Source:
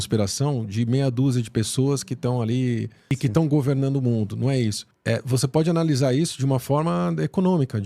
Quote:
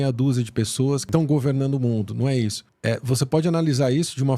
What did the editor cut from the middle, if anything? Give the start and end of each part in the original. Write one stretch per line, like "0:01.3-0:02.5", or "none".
0:02.0-0:03.3